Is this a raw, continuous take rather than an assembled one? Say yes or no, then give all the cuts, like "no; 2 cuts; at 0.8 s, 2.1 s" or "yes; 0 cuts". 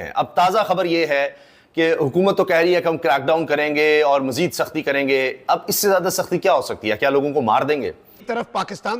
no; 1 cut; at 8.1 s